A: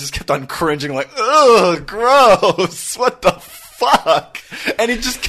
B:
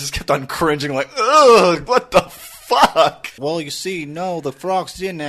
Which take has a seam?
B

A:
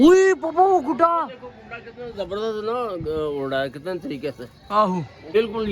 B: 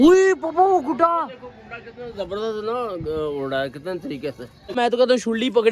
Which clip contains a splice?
B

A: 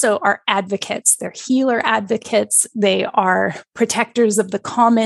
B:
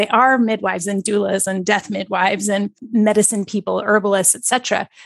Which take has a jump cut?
B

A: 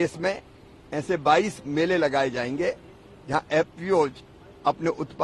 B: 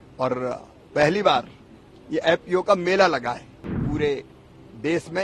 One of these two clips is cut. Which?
B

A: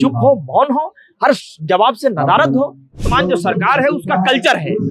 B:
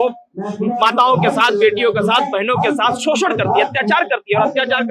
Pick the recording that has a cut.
A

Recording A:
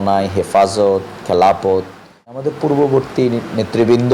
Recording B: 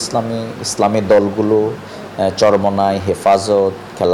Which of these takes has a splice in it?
A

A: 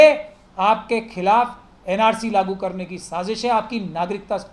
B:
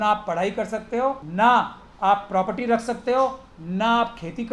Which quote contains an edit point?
B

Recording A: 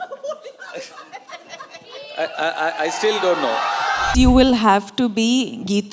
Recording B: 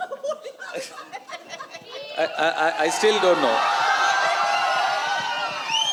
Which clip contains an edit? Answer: A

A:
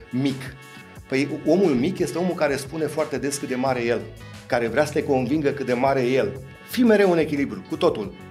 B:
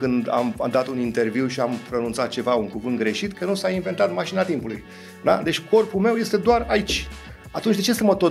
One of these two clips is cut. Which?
A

